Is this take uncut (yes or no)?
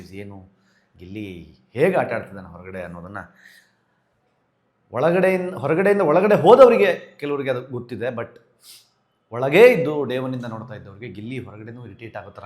yes